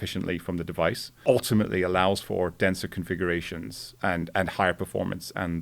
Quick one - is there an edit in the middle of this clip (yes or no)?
yes